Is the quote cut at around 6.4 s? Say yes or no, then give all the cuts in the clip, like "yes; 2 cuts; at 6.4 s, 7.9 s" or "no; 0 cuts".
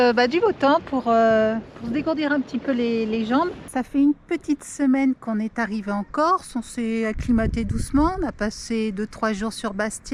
no; 1 cut; at 3.6 s